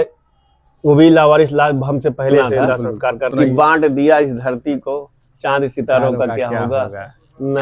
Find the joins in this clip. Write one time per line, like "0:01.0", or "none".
0:03.3